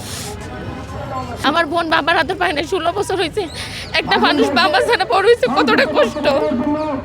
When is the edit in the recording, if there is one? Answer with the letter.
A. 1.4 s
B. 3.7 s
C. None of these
A